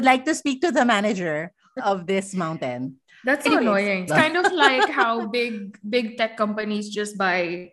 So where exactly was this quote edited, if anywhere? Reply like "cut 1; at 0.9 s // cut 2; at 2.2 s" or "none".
cut 1; at 1.7 s // cut 2; at 4.1 s